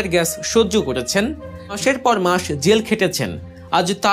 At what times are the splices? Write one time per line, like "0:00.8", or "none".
0:01.8

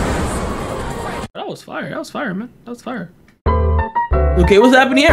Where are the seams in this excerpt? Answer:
0:03.4

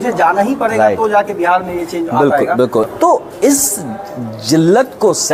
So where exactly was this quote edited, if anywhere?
0:02.9

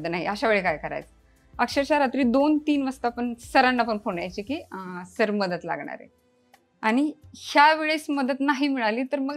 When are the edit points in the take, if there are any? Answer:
none

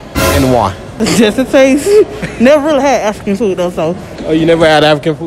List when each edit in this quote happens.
0:00.8
0:04.1

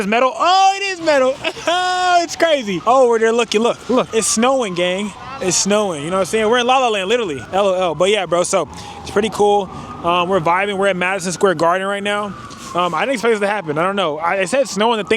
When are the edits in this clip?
0:02.7
0:04.1
0:05.2
0:07.4

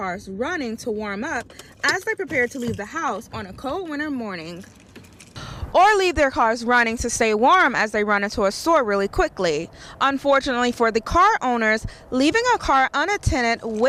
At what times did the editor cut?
none

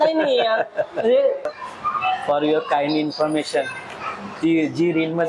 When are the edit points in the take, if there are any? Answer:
0:01.6

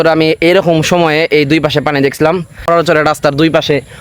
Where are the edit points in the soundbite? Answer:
0:02.6

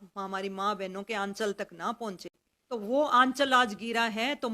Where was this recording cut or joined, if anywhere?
0:02.5

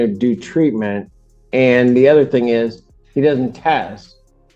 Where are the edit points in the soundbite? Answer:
none

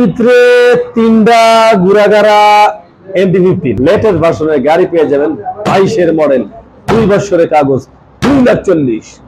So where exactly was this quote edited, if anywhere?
0:03.7

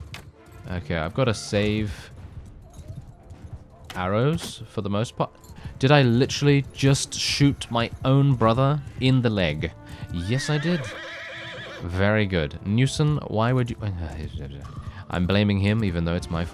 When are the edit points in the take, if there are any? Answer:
none

